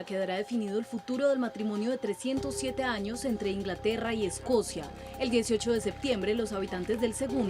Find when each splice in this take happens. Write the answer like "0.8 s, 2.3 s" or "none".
1.3 s

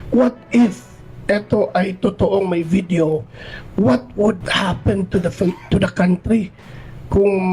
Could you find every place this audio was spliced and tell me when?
4.5 s

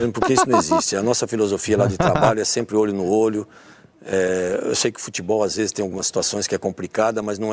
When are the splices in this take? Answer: none

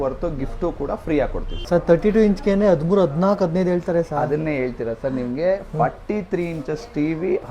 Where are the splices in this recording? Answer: 1.5 s

